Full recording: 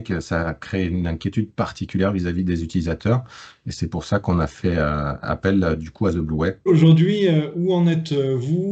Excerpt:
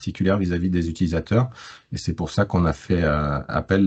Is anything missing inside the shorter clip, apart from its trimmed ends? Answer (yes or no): no